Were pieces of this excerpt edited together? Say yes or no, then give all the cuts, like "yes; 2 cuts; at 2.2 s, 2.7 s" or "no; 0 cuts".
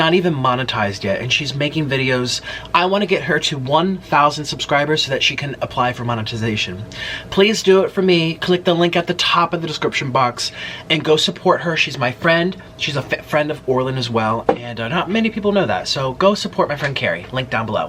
yes; 1 cut; at 14.4 s